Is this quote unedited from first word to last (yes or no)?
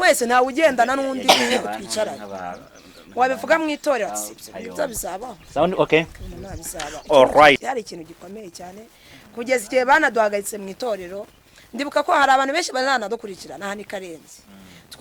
yes